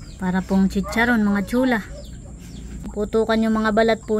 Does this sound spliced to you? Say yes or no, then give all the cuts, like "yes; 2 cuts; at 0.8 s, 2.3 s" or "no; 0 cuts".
yes; 1 cut; at 2.8 s